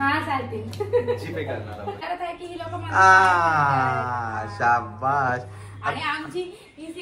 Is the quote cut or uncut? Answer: cut